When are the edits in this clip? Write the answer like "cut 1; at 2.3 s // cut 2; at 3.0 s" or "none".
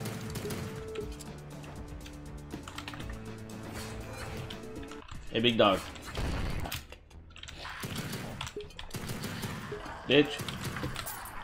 cut 1; at 6.6 s